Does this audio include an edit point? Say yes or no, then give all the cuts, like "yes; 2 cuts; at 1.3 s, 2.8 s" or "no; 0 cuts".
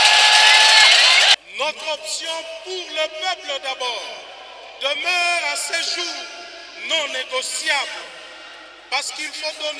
yes; 1 cut; at 1.4 s